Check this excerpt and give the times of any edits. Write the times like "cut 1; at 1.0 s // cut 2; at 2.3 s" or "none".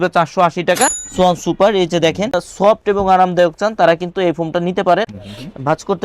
cut 1; at 1.0 s // cut 2; at 2.4 s // cut 3; at 5.1 s